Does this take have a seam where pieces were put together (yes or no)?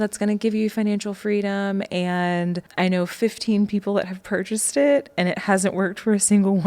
yes